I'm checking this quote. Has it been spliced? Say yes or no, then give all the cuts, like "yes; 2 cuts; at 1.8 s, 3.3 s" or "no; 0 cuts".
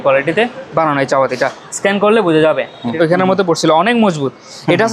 yes; 1 cut; at 2.9 s